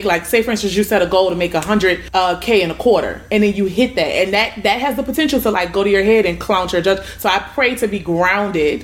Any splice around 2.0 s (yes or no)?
yes